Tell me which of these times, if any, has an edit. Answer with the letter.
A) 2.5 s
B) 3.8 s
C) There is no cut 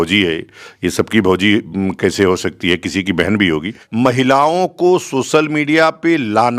B